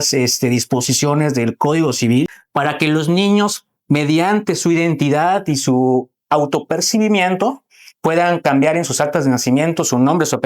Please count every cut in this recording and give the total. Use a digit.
1